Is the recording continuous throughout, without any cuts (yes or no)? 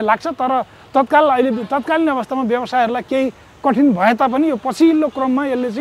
yes